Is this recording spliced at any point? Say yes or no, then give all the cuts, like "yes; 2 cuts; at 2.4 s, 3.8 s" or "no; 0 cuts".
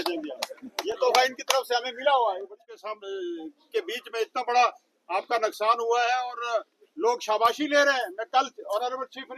yes; 1 cut; at 2.9 s